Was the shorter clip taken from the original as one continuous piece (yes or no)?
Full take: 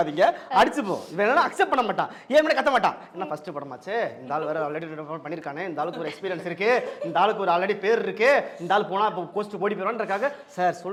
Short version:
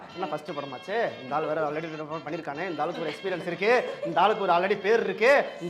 yes